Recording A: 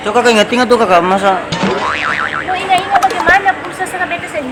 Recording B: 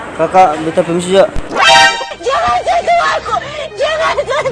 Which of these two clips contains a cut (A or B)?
B